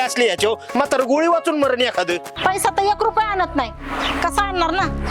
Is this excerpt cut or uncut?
cut